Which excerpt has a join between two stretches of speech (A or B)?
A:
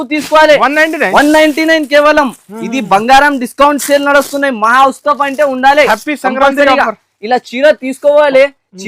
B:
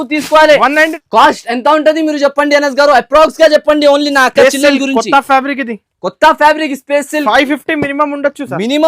B